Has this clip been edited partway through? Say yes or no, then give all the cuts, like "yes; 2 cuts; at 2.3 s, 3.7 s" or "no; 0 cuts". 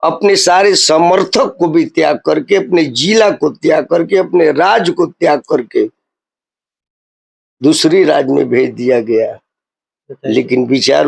no; 0 cuts